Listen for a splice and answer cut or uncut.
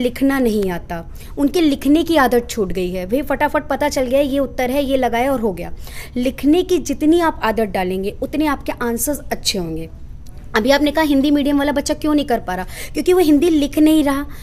uncut